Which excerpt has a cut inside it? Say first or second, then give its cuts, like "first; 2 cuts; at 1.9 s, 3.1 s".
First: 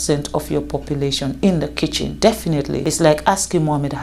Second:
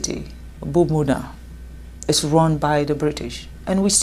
first; 2 cuts; at 2.1 s, 2.8 s